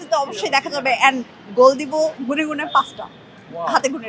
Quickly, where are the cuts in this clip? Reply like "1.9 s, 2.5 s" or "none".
none